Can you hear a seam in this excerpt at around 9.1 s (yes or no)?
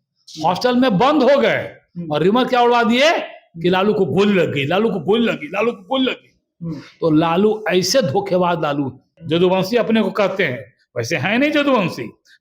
yes